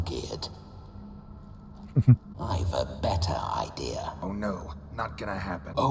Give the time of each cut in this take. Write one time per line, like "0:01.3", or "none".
0:02.3